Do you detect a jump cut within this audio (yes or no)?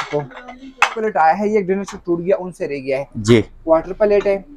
yes